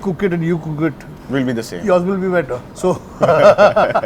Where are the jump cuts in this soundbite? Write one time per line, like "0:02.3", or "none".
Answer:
0:02.6